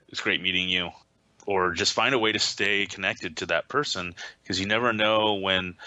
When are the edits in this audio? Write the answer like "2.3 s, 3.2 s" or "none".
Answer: 1.0 s